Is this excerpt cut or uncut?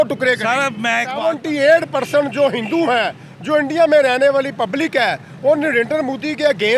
cut